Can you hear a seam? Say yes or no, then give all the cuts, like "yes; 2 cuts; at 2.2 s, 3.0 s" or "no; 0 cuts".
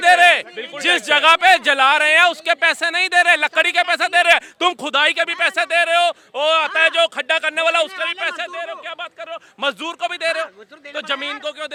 no; 0 cuts